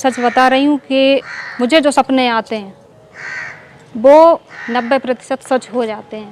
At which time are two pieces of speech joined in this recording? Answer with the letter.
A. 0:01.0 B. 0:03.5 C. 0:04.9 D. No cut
D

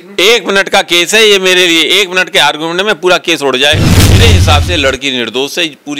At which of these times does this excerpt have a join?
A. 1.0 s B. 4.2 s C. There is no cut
B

